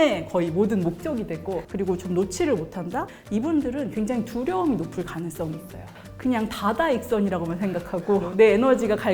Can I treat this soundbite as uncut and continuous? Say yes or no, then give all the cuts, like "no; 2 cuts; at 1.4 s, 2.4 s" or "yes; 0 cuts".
no; 2 cuts; at 2.0 s, 6.0 s